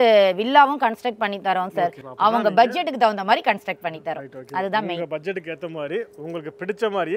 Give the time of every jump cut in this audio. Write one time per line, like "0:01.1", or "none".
0:02.0

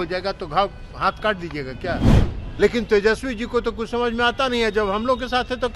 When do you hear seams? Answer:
0:02.2

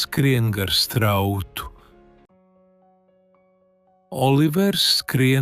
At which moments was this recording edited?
none

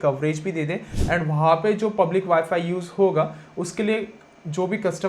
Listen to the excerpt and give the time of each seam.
0:00.9

